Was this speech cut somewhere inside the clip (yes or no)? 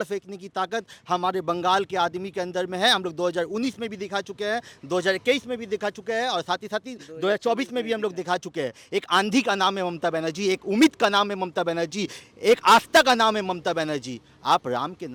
no